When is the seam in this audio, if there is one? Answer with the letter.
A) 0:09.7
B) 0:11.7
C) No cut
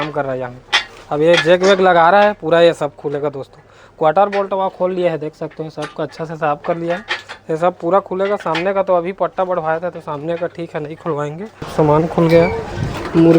B